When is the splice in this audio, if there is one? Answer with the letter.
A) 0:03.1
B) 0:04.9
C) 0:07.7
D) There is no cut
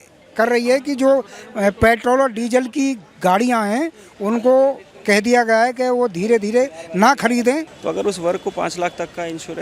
C